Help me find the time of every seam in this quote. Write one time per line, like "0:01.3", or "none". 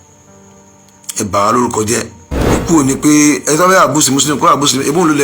0:02.6